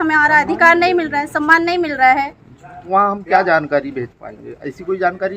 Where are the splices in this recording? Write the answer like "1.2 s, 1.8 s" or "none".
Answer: 2.9 s